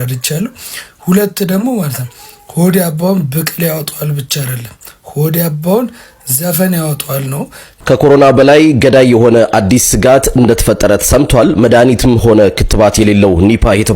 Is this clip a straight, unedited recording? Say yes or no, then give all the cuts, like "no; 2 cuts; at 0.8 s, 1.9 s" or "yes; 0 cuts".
no; 1 cut; at 7.7 s